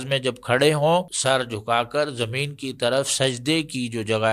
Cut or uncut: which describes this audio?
cut